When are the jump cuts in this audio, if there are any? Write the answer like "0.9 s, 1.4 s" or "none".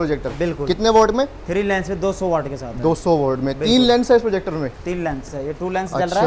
5.3 s